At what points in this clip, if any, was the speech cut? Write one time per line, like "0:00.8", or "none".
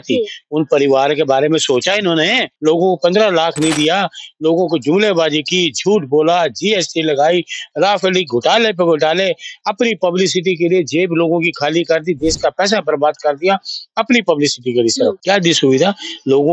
0:02.5
0:15.2